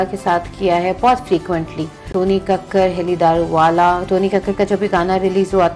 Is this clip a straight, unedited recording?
no; 1 cut; at 2.1 s

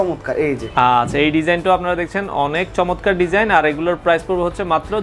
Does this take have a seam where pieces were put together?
no; 0 cuts

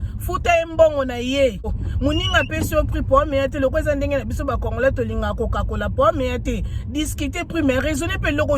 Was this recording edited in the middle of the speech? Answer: yes; 1 cut; at 1.8 s

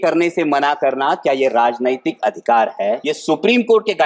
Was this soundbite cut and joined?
yes; 1 cut; at 3.1 s

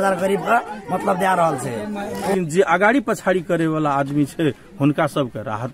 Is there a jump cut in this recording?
yes; 1 cut; at 2.3 s

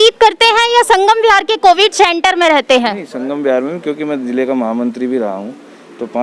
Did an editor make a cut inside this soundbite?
no; 0 cuts

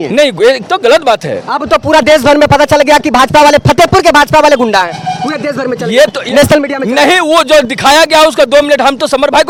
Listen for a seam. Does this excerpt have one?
no; 0 cuts

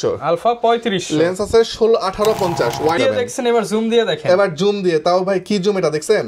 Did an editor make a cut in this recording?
yes; 1 cut; at 3.0 s

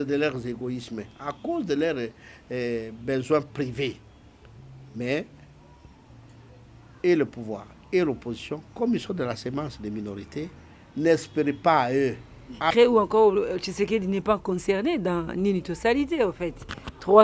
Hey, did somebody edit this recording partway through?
yes; 1 cut; at 12.7 s

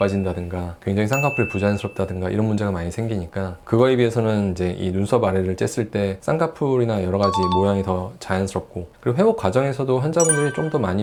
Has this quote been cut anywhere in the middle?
no; 0 cuts

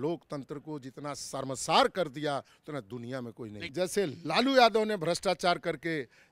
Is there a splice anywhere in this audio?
yes; 1 cut; at 3.7 s

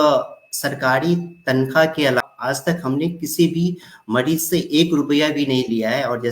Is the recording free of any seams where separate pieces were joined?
no; 1 cut; at 2.2 s

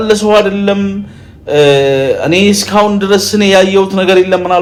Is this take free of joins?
yes; 0 cuts

